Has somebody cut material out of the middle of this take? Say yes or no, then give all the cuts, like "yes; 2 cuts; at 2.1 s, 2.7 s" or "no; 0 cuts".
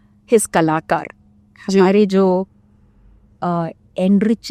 no; 0 cuts